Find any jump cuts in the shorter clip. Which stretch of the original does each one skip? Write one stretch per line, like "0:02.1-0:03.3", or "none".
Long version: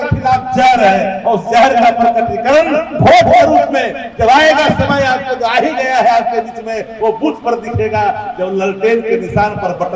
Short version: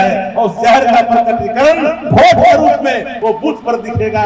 0:04.0-0:06.9